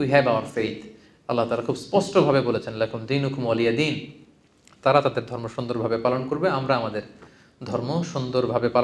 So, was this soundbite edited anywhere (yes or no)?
no